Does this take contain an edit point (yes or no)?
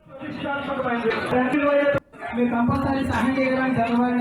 yes